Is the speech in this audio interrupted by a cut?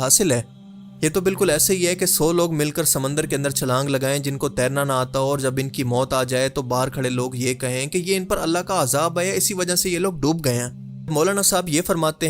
yes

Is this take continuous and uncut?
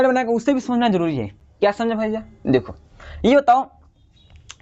yes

